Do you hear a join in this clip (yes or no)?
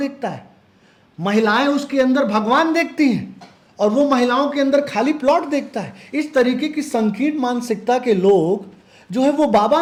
no